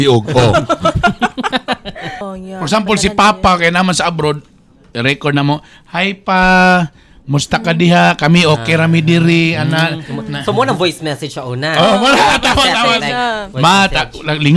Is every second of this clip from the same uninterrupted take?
no; 1 cut; at 2.2 s

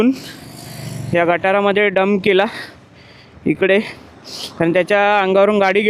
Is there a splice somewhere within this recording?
no; 0 cuts

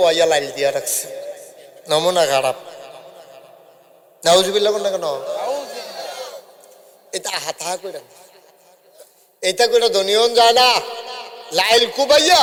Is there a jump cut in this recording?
no; 0 cuts

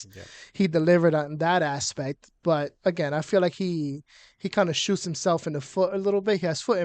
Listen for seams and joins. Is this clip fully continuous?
yes; 0 cuts

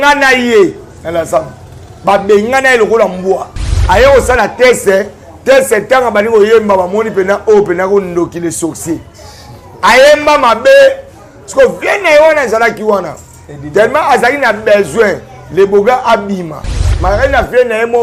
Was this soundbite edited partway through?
yes; 2 cuts; at 3.7 s, 16.9 s

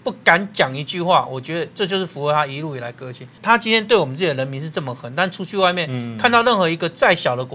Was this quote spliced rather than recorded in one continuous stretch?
yes; 1 cut; at 3.4 s

